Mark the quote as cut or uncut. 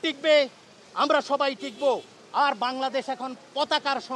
uncut